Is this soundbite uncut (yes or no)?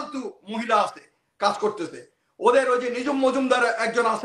yes